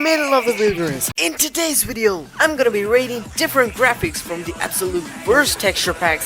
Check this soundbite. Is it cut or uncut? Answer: cut